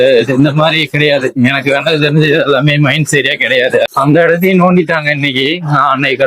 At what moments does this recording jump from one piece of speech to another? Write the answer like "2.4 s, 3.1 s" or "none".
3.9 s